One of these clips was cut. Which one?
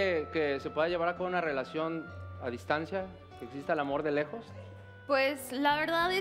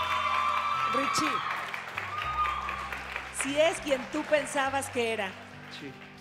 first; 1 cut; at 1.7 s

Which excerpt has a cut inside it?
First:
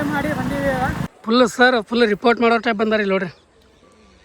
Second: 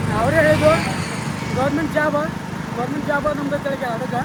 first; 1 cut; at 1.1 s

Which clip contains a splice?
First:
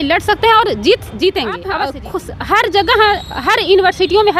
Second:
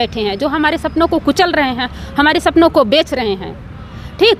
first; 1 cut; at 1.8 s

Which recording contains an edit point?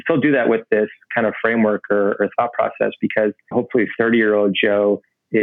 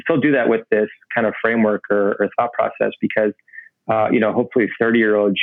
first; 1 cut; at 3.5 s

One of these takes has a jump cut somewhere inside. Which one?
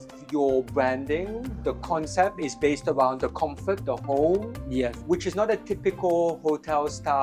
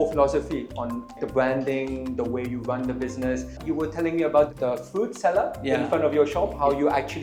second; 2 cuts; at 1.2 s, 3.6 s

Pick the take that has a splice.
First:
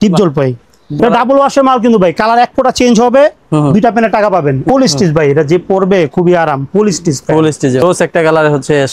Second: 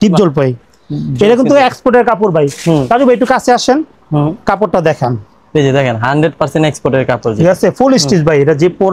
first; 3 cuts; at 1.0 s, 4.6 s, 7.8 s

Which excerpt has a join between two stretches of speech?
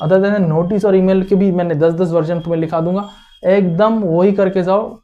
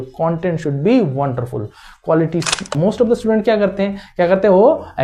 second; 1 cut; at 2.7 s

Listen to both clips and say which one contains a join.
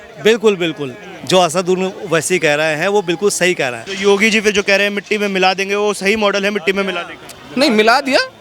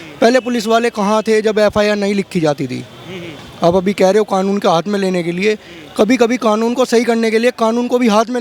first; 1 cut; at 3.8 s

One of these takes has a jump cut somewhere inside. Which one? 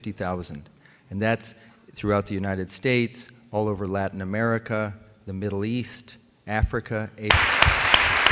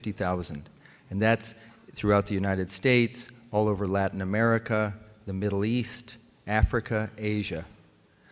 second; 1 cut; at 7.3 s

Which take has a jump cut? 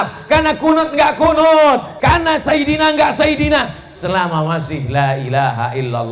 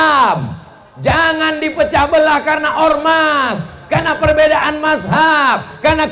first; 1 cut; at 1.9 s

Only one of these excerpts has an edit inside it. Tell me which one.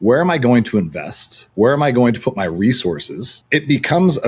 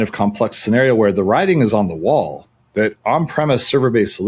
first; 1 cut; at 3.3 s

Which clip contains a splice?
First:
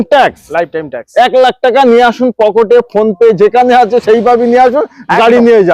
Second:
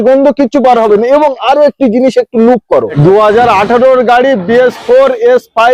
second; 1 cut; at 2.9 s

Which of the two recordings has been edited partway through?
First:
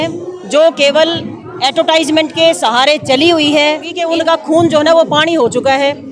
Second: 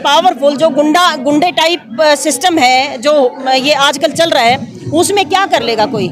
first; 1 cut; at 4.0 s

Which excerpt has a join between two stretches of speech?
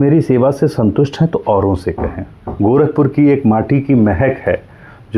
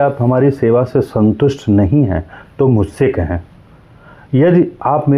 first; 1 cut; at 2.4 s

